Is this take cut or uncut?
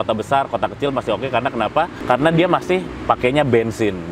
cut